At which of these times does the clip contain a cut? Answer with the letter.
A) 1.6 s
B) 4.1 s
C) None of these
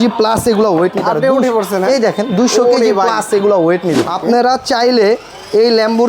B